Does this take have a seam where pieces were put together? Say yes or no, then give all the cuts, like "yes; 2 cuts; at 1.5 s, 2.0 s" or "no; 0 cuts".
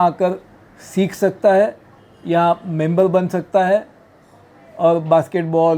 no; 0 cuts